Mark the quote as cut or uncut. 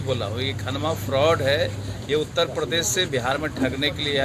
uncut